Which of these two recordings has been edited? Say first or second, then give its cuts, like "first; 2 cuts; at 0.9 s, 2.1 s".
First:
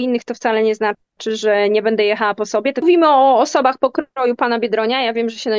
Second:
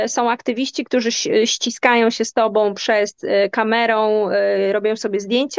first; 1 cut; at 2.8 s